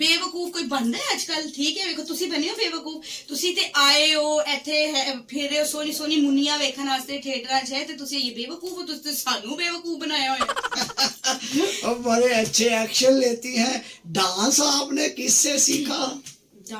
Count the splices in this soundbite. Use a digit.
0